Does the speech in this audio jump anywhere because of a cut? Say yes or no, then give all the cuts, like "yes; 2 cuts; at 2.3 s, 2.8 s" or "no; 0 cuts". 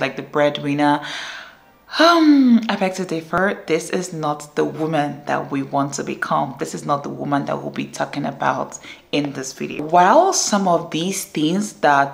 no; 0 cuts